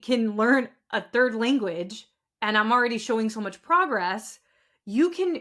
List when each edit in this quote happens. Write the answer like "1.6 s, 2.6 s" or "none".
none